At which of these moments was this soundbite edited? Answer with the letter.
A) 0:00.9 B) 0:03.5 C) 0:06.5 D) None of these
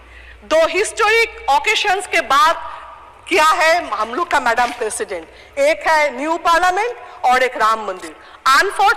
D